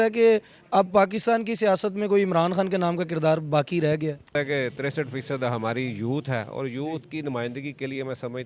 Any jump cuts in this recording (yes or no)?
yes